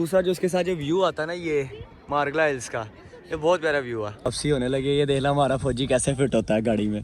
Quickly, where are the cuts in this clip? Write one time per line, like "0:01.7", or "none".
0:04.3